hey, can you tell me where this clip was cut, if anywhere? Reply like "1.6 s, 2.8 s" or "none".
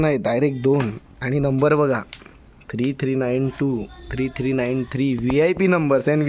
none